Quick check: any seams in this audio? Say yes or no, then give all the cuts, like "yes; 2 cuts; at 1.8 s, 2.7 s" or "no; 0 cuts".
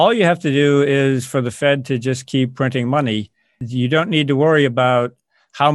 yes; 1 cut; at 3.6 s